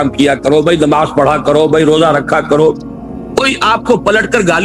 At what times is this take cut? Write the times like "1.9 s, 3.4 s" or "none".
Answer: none